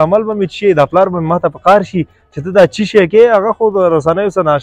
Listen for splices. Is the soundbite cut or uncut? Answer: uncut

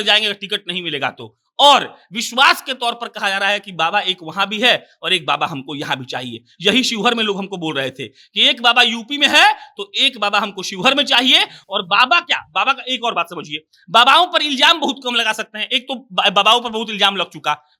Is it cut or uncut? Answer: uncut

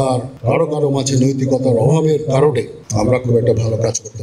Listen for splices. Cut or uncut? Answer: uncut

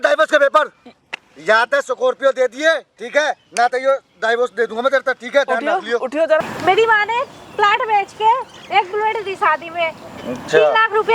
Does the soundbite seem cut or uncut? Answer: cut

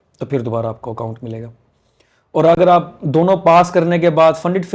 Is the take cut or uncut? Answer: uncut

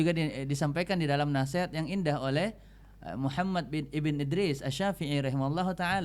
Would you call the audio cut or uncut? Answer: uncut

